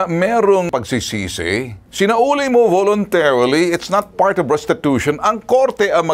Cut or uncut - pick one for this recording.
uncut